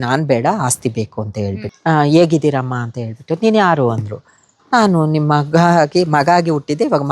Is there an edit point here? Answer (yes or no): yes